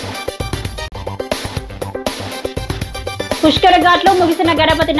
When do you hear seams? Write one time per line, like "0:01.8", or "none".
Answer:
none